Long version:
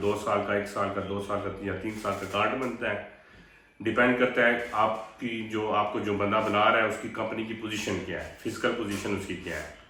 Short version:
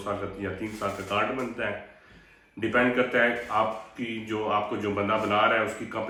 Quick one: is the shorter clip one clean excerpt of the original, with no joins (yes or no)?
yes